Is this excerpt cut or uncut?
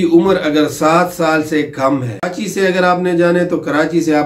cut